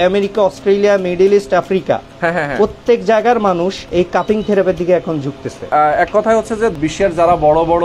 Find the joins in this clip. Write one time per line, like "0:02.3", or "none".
0:03.8
0:05.6
0:06.7